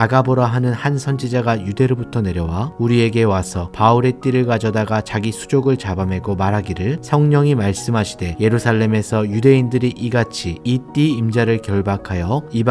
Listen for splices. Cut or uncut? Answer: uncut